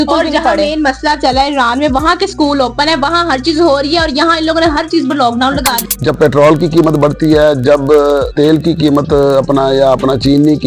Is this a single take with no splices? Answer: no; 2 cuts; at 5.7 s, 8.3 s

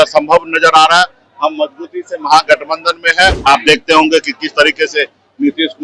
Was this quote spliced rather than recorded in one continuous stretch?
yes; 1 cut; at 3.4 s

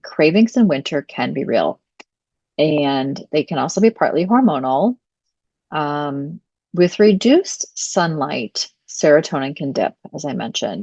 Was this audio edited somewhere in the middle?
no; 0 cuts

